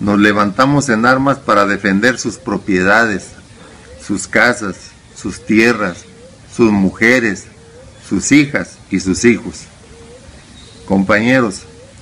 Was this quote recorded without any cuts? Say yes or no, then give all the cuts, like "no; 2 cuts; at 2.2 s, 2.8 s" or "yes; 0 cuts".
no; 1 cut; at 4.4 s